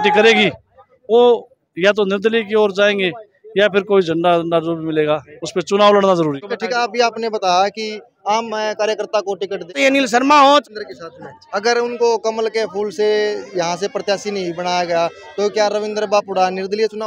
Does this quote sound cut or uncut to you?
cut